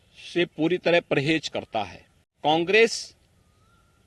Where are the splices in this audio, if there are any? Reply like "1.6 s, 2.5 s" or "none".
2.4 s